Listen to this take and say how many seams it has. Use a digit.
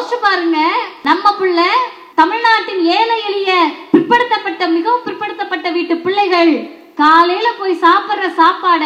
2